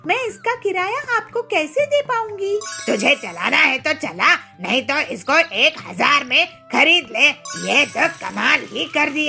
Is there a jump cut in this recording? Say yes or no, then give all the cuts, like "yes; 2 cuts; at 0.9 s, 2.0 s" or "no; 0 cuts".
yes; 2 cuts; at 2.7 s, 7.4 s